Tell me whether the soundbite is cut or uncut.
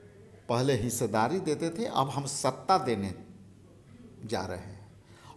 uncut